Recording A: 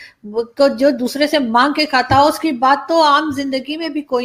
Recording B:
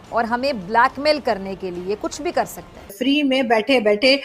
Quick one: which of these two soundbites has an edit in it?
B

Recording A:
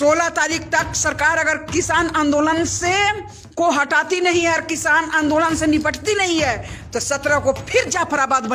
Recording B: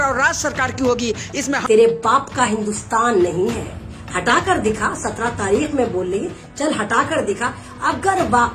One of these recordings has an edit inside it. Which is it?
B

